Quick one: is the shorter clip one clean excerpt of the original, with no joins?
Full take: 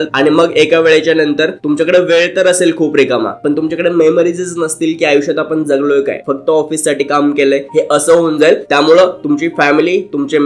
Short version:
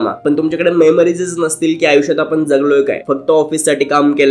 yes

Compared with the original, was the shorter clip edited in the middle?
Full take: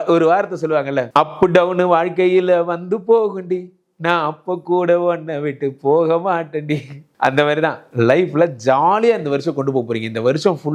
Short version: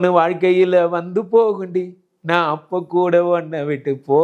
no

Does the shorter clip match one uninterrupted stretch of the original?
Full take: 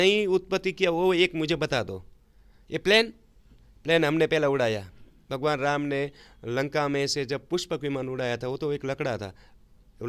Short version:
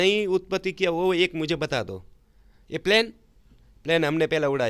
yes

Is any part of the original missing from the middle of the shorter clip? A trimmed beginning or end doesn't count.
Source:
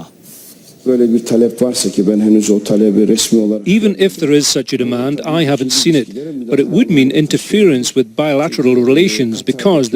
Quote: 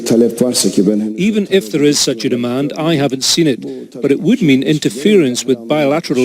yes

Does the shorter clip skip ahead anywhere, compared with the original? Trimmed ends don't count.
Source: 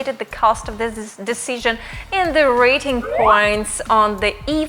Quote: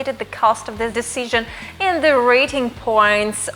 yes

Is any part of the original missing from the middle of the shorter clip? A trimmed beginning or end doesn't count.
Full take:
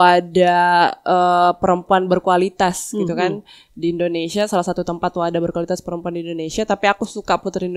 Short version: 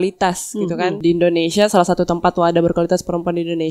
yes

